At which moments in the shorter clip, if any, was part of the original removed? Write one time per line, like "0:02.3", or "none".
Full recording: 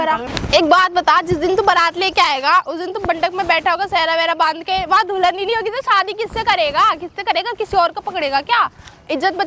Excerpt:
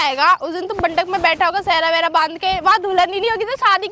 none